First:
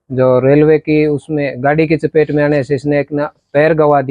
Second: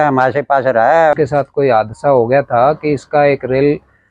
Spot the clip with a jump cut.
second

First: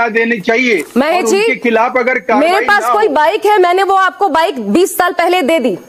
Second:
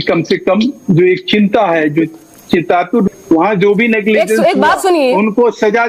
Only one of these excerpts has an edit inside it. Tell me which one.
second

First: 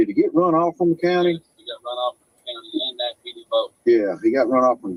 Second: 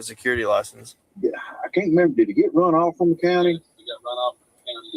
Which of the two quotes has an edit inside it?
second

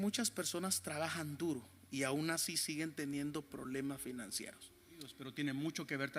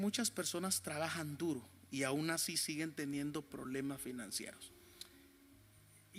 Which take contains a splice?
first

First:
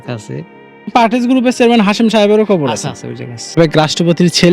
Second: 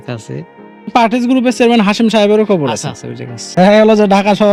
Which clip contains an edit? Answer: first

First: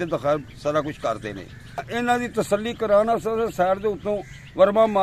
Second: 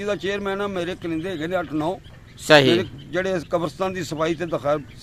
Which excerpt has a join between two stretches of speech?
first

